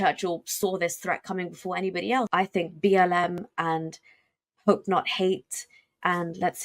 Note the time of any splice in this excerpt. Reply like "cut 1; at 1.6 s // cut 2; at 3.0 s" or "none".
cut 1; at 2.3 s